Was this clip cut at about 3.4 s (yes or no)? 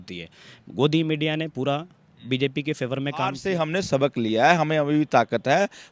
yes